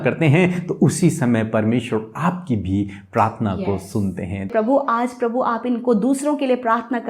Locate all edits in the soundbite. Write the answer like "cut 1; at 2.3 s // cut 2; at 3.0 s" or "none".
cut 1; at 4.5 s

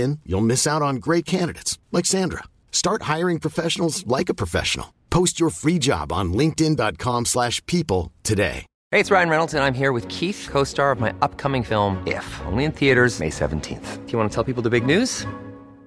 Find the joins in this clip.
cut 1; at 8.7 s

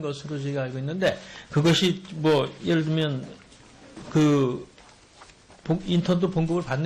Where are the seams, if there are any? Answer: cut 1; at 1.1 s

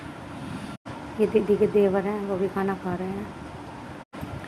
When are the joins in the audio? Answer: none

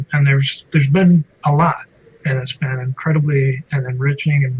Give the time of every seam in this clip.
none

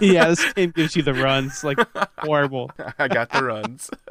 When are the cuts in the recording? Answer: cut 1; at 2.8 s

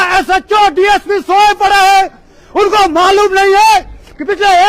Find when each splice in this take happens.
none

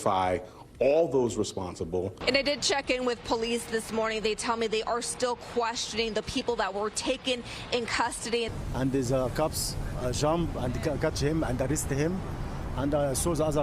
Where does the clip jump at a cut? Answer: cut 1; at 2.1 s // cut 2; at 8.5 s

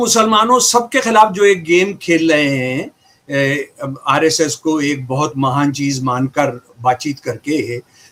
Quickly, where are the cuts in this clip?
none

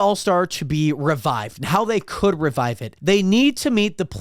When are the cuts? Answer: cut 1; at 2.9 s

